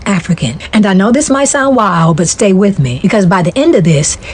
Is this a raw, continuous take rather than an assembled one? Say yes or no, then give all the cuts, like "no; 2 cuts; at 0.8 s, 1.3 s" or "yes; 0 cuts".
yes; 0 cuts